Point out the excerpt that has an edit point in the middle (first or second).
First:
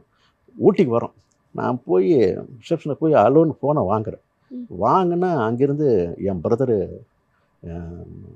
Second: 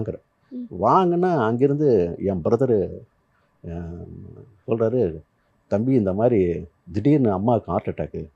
first